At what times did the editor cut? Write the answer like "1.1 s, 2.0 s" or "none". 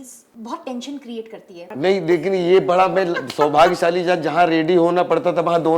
1.7 s